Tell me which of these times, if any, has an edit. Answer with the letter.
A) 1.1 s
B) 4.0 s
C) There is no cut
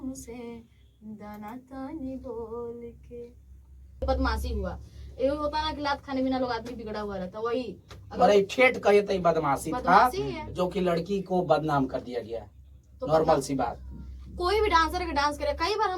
B